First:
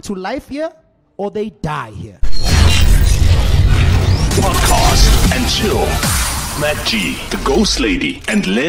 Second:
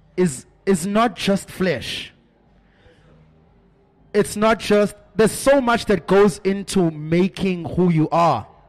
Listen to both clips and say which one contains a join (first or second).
first